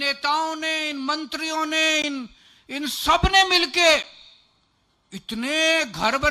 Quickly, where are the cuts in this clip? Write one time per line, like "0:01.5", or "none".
none